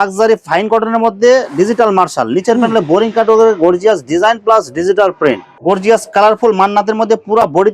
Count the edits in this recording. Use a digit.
1